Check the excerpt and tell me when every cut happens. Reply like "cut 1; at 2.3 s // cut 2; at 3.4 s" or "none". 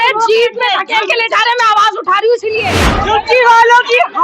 cut 1; at 3.0 s